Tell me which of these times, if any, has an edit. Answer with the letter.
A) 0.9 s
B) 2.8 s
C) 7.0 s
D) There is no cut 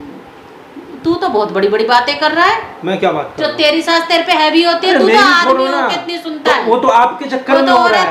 D